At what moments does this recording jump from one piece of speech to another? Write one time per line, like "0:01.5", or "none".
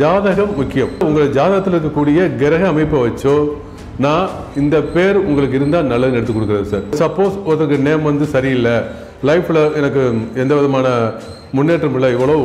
0:01.0
0:06.9